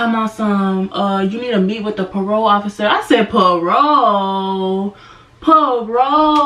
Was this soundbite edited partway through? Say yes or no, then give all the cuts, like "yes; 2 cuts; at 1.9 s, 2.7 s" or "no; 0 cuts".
no; 0 cuts